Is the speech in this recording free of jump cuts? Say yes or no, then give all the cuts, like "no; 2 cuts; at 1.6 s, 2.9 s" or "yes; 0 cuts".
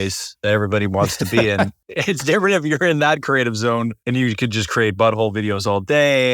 no; 2 cuts; at 1.9 s, 4.0 s